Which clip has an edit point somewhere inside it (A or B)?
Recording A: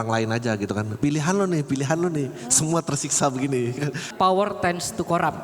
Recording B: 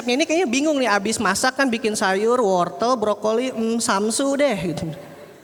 A